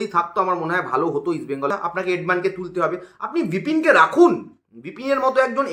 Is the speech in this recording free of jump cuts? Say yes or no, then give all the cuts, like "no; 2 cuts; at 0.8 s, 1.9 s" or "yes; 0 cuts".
no; 1 cut; at 1.7 s